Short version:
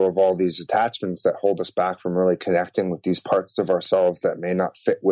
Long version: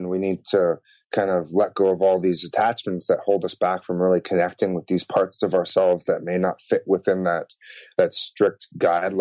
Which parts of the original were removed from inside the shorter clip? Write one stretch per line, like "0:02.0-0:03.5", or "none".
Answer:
none